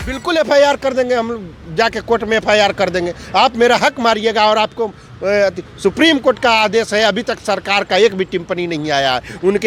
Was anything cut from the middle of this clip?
no; 0 cuts

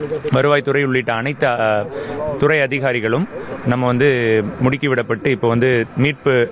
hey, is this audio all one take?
yes; 0 cuts

